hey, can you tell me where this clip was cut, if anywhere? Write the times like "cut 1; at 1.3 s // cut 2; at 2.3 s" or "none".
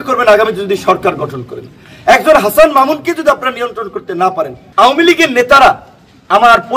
cut 1; at 4.6 s

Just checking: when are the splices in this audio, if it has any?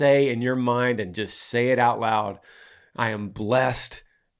none

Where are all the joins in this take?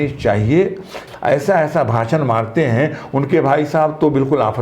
cut 1; at 1.0 s

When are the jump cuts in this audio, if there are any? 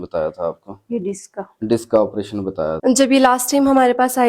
cut 1; at 2.8 s

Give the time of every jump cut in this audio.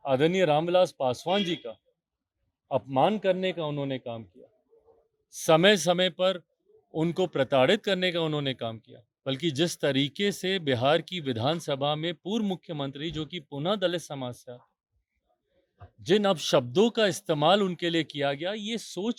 none

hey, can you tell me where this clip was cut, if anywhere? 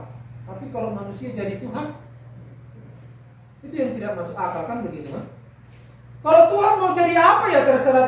none

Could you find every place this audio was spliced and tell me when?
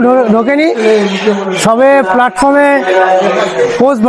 none

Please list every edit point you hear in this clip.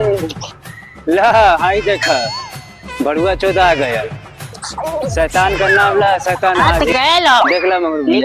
cut 1; at 6.7 s

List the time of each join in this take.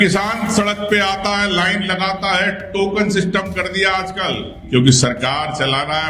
cut 1; at 4.6 s

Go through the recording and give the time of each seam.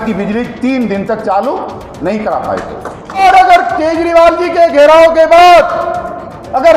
cut 1; at 3.2 s

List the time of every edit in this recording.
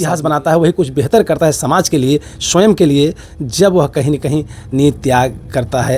none

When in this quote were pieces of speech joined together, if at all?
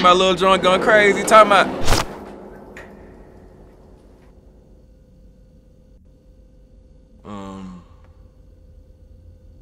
none

